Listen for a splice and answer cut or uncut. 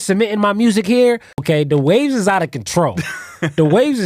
cut